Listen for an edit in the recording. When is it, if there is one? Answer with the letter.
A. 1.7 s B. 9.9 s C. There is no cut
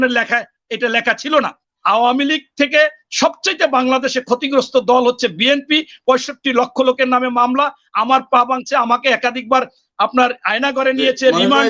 A